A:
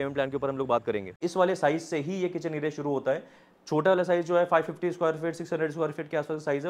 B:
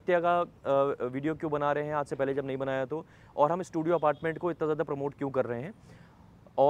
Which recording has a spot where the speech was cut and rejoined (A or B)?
A